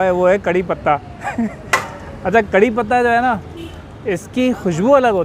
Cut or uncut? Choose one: uncut